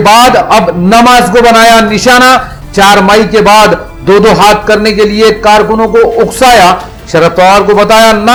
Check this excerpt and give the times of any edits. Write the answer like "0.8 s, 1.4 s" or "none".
none